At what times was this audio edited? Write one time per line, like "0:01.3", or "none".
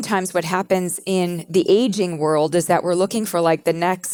none